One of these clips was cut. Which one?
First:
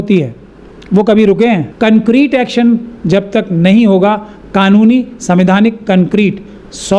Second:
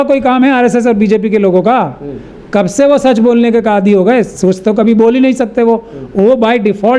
first; 1 cut; at 1.7 s

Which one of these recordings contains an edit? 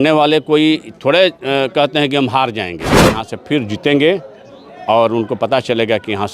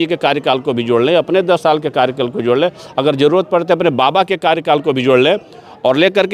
first; 1 cut; at 3.2 s

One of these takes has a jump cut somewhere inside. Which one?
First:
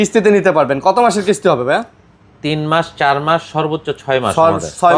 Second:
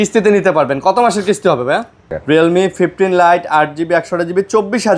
second; 1 cut; at 2.2 s

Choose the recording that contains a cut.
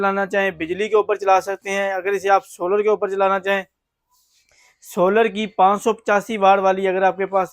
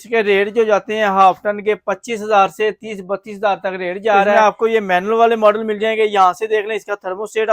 second; 1 cut; at 4.3 s

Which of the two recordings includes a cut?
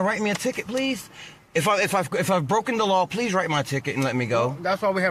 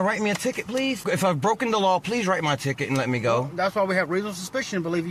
second; 1 cut; at 1.0 s

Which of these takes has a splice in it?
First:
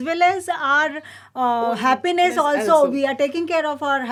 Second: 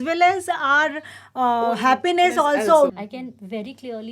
second; 1 cut; at 2.9 s

